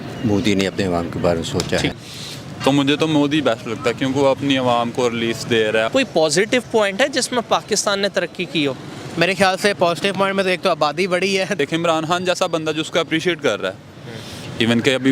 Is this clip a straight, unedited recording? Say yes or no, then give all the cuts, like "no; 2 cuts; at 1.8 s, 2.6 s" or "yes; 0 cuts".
no; 3 cuts; at 1.9 s, 5.9 s, 11.6 s